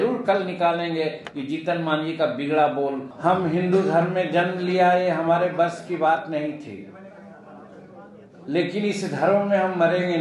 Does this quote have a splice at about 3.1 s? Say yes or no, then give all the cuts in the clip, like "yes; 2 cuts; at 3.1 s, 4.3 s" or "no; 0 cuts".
yes; 1 cut; at 3.1 s